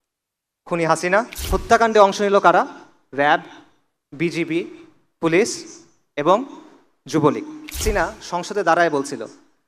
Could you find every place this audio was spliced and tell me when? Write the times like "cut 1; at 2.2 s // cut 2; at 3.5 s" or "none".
cut 1; at 1.4 s // cut 2; at 7.8 s